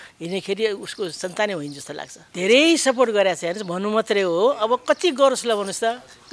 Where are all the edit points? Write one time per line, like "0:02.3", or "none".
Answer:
0:02.2

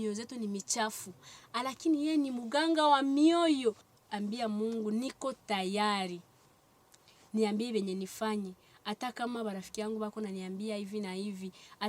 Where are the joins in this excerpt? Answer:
0:03.9

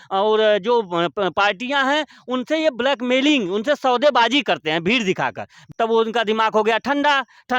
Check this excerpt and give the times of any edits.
0:05.6

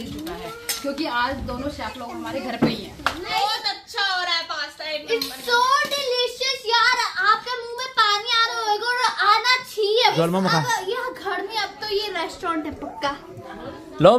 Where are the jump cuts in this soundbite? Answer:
0:03.3
0:10.1

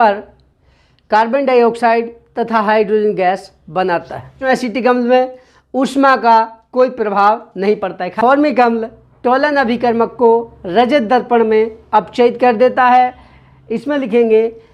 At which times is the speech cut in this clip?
0:04.4
0:08.0

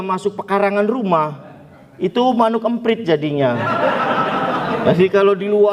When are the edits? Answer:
none

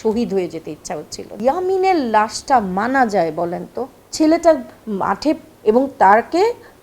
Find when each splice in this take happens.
0:01.4

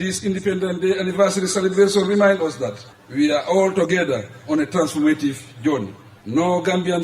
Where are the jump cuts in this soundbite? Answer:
none

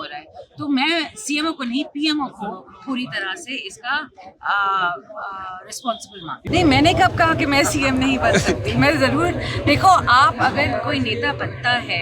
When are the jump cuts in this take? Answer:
0:06.4

